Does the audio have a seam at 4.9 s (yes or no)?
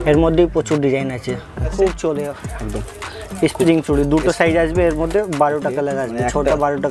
no